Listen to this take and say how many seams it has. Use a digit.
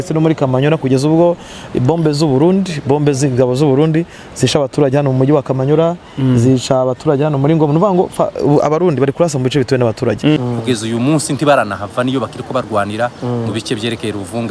1